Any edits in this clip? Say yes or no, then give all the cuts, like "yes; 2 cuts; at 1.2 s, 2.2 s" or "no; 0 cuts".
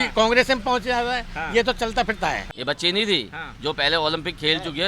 yes; 1 cut; at 2.5 s